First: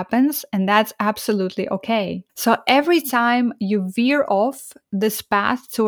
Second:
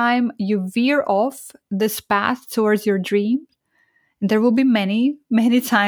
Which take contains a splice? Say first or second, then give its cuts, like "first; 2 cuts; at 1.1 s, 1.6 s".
first; 1 cut; at 2.2 s